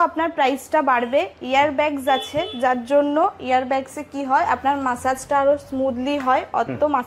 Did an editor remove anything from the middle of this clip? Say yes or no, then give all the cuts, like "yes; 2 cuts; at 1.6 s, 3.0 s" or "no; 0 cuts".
no; 0 cuts